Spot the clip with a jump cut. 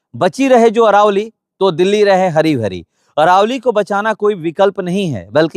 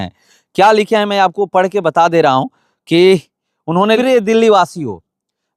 second; 1 cut; at 4.0 s

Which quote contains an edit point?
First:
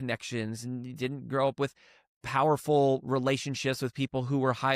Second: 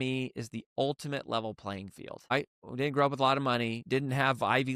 second; 2 cuts; at 2.3 s, 3.8 s

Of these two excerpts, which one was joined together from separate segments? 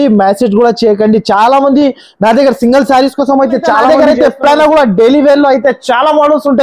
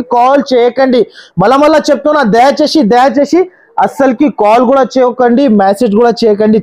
first; 1 cut; at 3.9 s

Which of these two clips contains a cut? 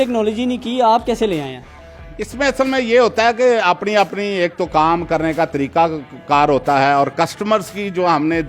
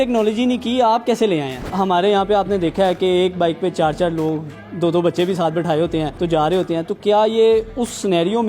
second; 2 cuts; at 1.6 s, 6.1 s

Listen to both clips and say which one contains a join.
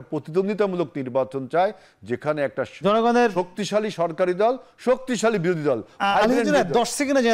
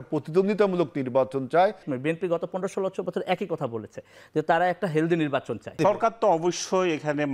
second; 2 cuts; at 1.9 s, 5.8 s

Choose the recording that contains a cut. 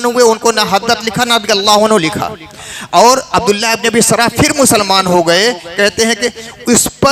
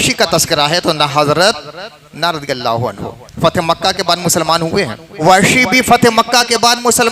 second; 1 cut; at 5.1 s

